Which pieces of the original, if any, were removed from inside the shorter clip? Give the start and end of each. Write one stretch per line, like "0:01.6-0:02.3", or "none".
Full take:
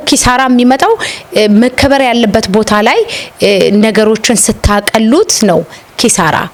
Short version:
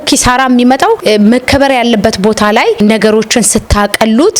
0:01.0-0:01.3
0:03.1-0:03.7